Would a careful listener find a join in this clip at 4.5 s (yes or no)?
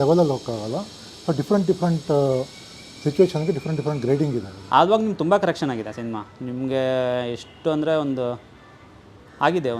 yes